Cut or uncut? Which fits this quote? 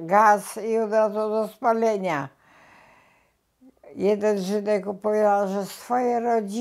uncut